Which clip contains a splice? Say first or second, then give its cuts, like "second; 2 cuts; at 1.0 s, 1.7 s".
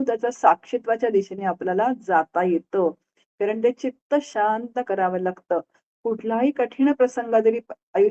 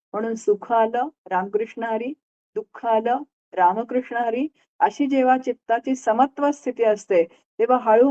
first; 1 cut; at 4.3 s